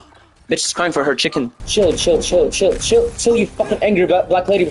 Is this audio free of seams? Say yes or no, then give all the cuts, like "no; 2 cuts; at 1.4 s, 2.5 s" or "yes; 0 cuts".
no; 1 cut; at 1.6 s